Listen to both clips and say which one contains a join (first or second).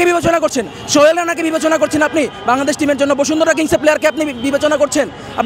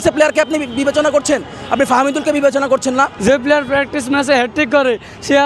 second